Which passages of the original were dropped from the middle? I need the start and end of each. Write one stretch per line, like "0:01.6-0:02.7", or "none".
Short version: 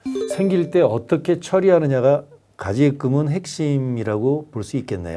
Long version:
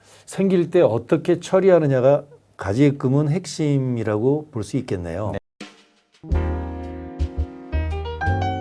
none